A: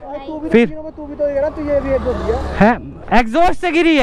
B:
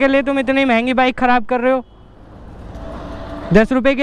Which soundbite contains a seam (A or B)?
B